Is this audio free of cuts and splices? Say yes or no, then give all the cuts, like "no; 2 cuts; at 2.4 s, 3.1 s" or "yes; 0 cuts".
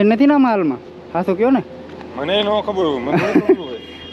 yes; 0 cuts